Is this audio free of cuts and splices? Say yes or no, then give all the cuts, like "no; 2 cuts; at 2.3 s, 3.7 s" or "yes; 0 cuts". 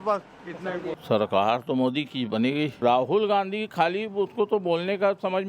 no; 2 cuts; at 1.0 s, 2.7 s